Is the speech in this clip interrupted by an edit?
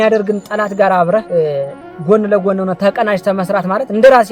yes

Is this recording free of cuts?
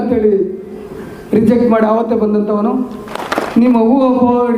no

